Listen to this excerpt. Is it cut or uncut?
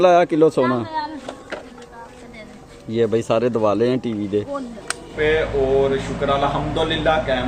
cut